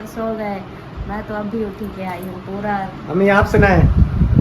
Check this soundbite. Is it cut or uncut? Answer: uncut